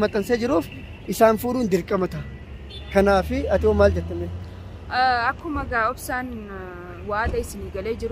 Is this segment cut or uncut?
uncut